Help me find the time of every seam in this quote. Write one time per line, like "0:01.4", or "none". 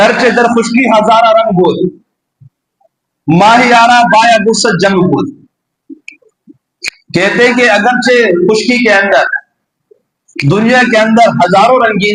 none